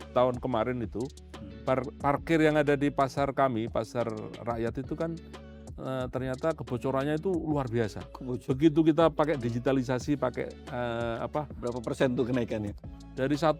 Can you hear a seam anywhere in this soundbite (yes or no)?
no